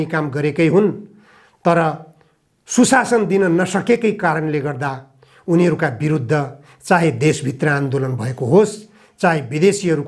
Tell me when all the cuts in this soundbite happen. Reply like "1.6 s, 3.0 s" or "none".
none